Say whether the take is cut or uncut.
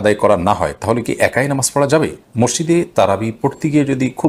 uncut